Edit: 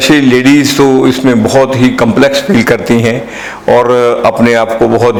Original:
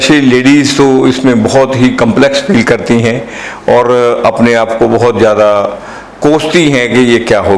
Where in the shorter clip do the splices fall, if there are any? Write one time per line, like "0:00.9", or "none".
none

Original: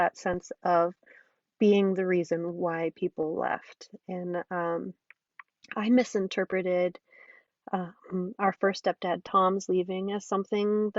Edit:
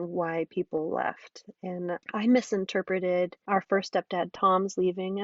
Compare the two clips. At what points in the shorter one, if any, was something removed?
0:02.0
0:03.4

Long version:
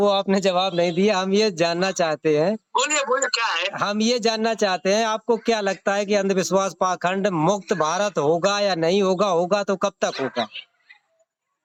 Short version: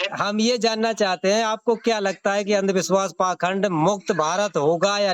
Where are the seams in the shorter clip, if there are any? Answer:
none

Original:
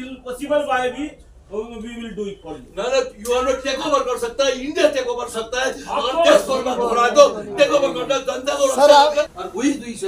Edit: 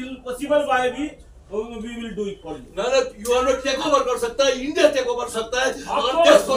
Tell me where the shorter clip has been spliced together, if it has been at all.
none

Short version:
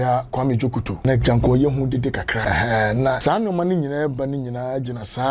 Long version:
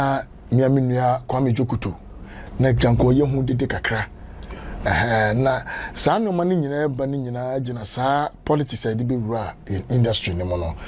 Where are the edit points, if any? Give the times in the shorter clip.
0:00.9
0:02.4
0:03.2

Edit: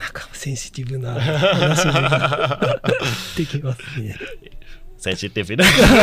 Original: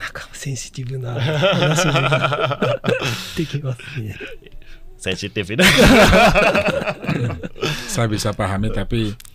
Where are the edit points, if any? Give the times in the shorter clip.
none

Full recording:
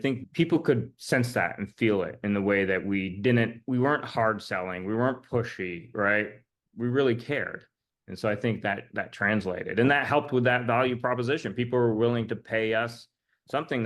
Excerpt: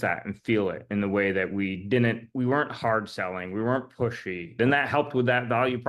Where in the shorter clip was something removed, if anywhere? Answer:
0:04.5

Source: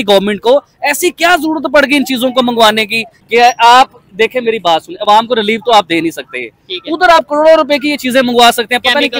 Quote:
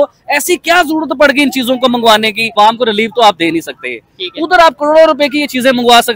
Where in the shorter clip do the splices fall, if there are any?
0:02.4

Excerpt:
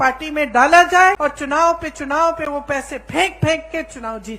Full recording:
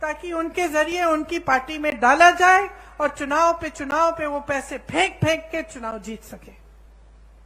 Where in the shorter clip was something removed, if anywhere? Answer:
0:01.2

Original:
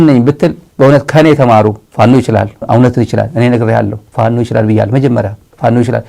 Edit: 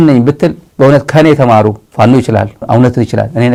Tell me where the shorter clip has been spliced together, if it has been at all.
none

